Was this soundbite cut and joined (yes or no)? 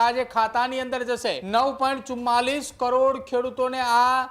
yes